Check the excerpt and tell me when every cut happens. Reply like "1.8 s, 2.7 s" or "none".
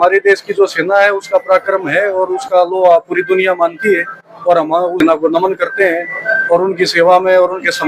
none